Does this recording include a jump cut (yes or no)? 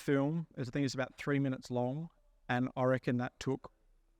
no